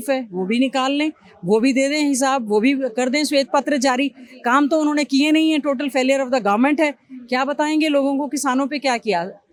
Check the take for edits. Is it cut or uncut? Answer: uncut